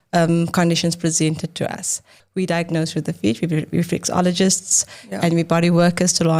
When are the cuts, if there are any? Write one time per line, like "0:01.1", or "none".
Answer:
0:02.2

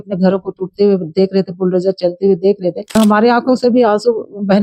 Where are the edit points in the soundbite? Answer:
0:02.8

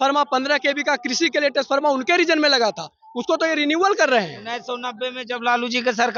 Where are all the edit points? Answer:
none

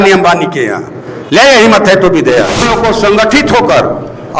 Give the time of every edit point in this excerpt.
0:02.7

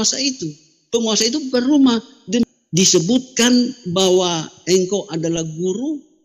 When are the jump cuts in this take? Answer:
0:02.4

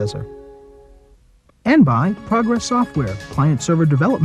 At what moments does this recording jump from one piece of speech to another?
0:01.6

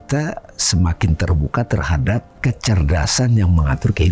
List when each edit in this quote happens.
0:02.3

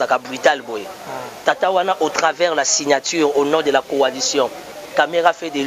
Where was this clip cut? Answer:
none

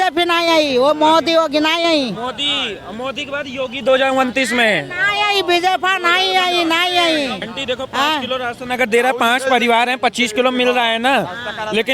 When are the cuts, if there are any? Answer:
0:07.5

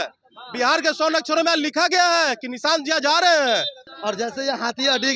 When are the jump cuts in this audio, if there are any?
0:03.9

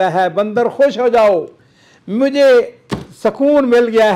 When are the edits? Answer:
none

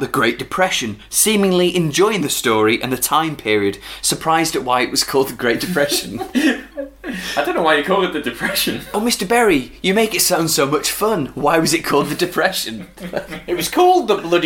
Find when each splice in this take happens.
none

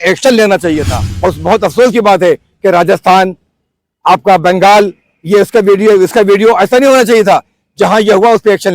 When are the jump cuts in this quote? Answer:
0:01.1

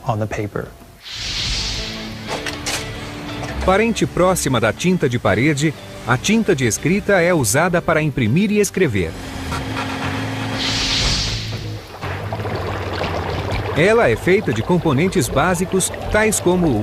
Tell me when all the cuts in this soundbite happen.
0:13.1

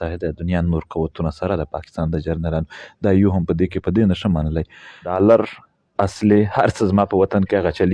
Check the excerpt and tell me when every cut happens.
0:05.1

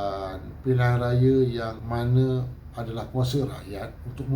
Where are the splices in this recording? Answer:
0:01.8

